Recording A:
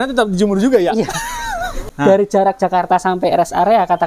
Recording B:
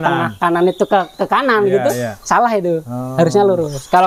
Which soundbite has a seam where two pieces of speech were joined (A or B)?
A